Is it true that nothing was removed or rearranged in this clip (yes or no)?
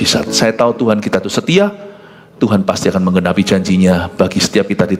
yes